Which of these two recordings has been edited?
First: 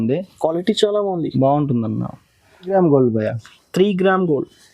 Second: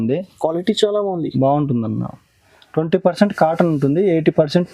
first; 1 cut; at 2.7 s

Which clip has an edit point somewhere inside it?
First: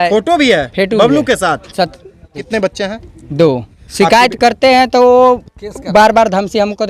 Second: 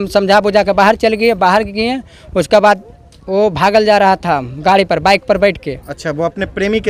first; 2 cuts; at 2.5 s, 3.8 s

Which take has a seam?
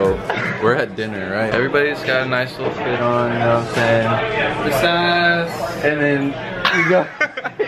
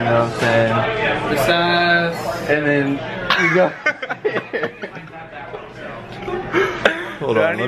first; 1 cut; at 1.5 s

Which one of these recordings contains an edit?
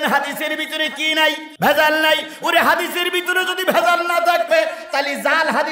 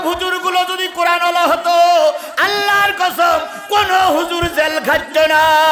first; 1 cut; at 1.5 s

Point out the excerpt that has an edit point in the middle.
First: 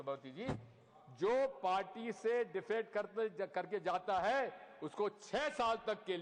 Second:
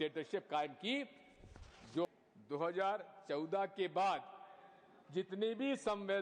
second; 1 cut; at 2.0 s

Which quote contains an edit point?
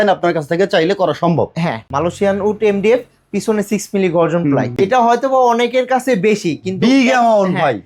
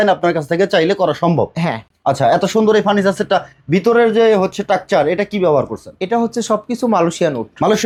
first; 2 cuts; at 1.9 s, 4.8 s

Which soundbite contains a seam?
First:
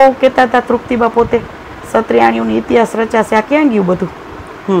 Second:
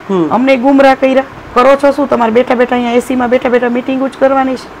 second; 1 cut; at 1.4 s

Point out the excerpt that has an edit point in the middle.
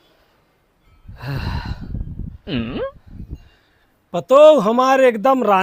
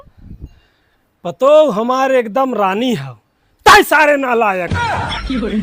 second; 1 cut; at 4.7 s

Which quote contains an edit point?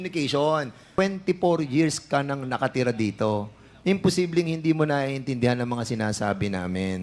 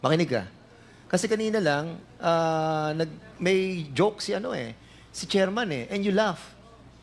first; 1 cut; at 1.0 s

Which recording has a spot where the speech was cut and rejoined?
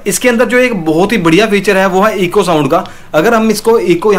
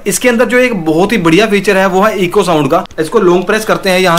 second; 1 cut; at 3.0 s

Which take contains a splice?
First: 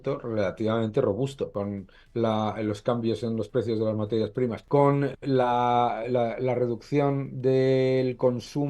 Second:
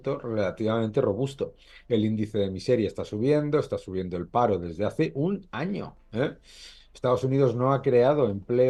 first; 2 cuts; at 1.5 s, 4.6 s

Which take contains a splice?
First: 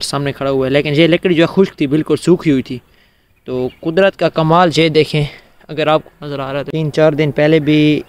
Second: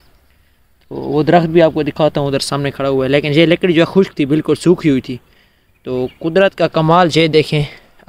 first; 1 cut; at 6.7 s

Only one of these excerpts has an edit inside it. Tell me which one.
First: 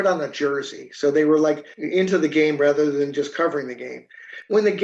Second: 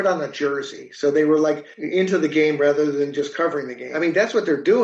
second; 1 cut; at 3.8 s

